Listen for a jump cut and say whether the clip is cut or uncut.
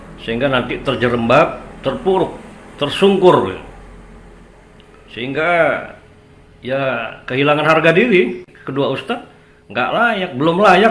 cut